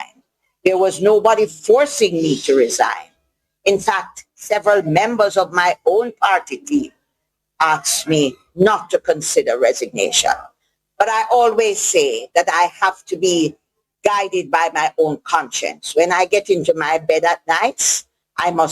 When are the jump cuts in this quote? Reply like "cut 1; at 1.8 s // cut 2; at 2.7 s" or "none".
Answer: none